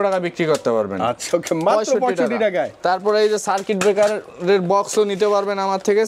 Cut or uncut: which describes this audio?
uncut